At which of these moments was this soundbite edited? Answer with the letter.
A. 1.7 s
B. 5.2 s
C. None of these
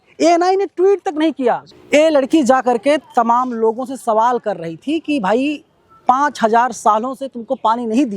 A